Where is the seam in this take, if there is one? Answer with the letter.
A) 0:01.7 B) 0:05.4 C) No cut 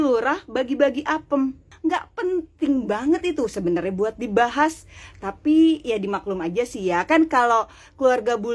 A